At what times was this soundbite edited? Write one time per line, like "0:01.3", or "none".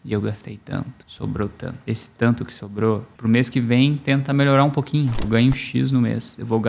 0:01.0
0:01.8
0:03.1
0:05.3